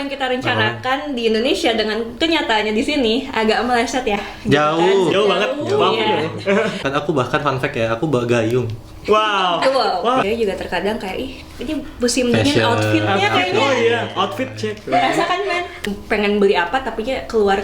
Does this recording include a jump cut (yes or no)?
yes